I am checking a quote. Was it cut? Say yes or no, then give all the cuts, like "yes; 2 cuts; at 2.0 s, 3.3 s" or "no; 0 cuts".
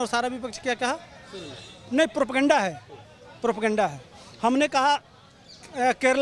no; 0 cuts